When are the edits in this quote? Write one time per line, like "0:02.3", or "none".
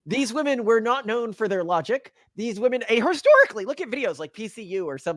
none